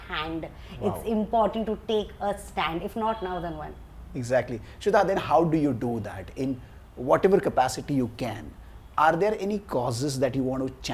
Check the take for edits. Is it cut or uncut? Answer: uncut